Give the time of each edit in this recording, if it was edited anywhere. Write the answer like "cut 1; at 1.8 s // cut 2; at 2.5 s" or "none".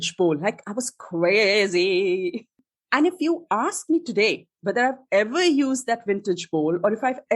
cut 1; at 2.4 s